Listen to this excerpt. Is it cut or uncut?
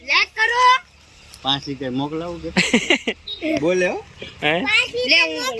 uncut